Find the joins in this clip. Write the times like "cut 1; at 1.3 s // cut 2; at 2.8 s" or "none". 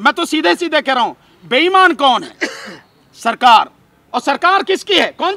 none